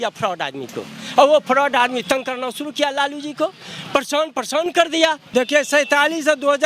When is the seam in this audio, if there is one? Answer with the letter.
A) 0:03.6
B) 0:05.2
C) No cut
B